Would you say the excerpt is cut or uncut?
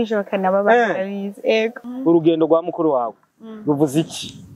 cut